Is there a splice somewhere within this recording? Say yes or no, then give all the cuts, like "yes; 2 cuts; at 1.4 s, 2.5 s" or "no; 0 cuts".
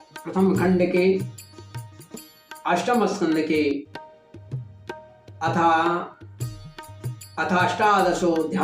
yes; 2 cuts; at 3.9 s, 5.3 s